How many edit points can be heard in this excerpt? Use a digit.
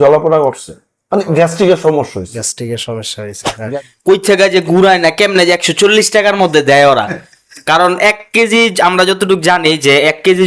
1